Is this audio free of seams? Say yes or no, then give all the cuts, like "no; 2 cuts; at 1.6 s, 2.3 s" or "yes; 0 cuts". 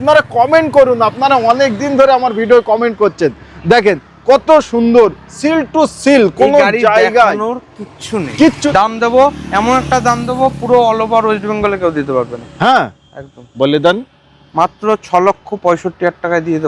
no; 1 cut; at 8.7 s